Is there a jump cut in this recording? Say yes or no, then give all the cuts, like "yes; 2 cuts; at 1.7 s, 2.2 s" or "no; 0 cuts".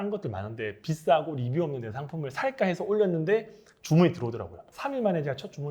yes; 1 cut; at 4.7 s